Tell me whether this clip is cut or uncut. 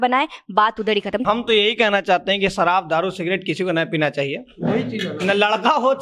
cut